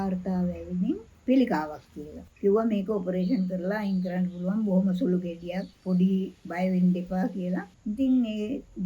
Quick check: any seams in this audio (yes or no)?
yes